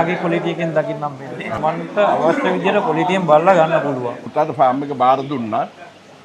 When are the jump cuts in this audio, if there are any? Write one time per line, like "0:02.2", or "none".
0:01.6
0:04.2